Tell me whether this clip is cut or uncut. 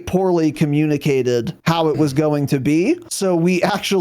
cut